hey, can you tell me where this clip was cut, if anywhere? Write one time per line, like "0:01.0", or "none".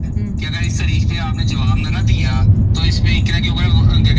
none